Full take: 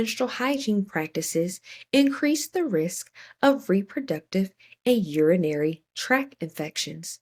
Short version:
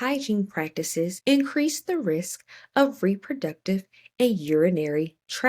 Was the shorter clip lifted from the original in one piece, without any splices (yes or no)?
no